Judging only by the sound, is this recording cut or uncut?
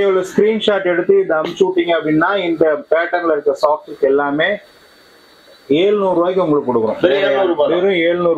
uncut